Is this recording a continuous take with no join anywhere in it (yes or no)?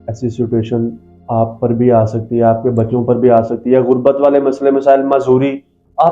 yes